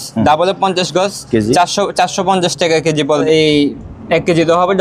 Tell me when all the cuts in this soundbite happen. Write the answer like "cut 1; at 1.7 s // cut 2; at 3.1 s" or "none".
cut 1; at 3.2 s